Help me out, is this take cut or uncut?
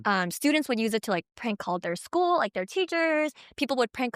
uncut